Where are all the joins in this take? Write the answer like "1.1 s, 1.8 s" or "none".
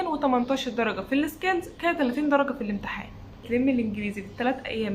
3.4 s